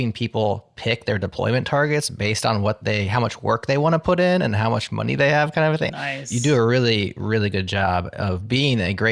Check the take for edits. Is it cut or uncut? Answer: cut